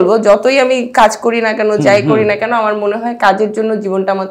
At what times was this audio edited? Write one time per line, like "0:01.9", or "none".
none